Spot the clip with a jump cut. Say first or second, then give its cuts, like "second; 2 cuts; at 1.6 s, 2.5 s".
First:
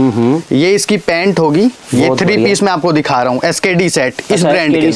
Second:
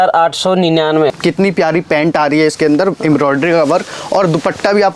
second; 1 cut; at 1.2 s